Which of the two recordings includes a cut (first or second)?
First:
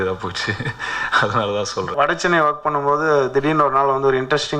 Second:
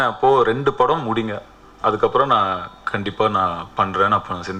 first